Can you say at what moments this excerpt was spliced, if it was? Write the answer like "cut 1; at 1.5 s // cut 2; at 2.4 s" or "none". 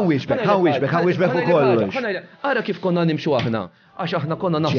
none